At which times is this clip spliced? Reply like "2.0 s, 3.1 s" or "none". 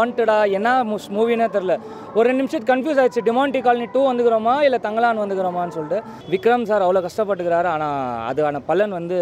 6.1 s